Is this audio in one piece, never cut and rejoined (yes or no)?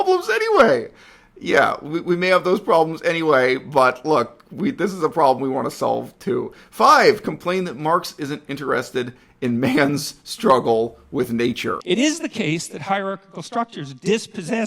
no